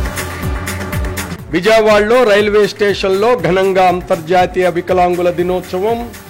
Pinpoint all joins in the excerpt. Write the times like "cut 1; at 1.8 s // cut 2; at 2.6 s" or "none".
cut 1; at 1.3 s

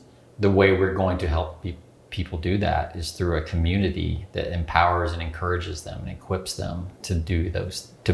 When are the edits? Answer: none

